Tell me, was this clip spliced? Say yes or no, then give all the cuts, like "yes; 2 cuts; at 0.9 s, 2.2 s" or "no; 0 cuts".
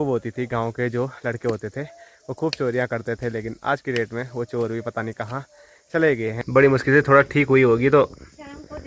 yes; 1 cut; at 6.4 s